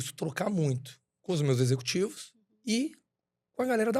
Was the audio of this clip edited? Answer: no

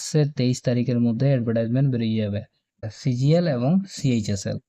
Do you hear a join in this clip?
yes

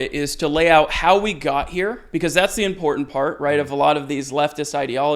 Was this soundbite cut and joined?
no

